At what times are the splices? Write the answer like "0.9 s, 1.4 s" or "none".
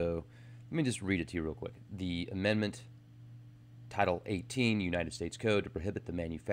5.3 s